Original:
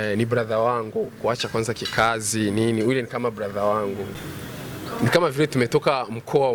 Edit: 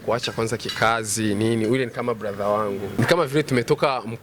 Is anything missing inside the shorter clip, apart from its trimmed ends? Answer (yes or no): yes